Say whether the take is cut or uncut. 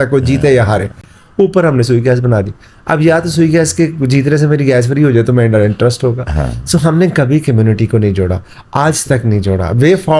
uncut